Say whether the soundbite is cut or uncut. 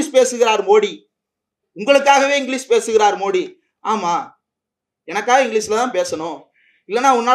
uncut